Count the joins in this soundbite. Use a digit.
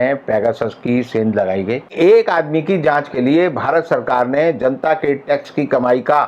1